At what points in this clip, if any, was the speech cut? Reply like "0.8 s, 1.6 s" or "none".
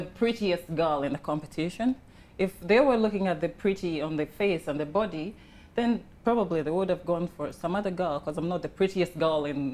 none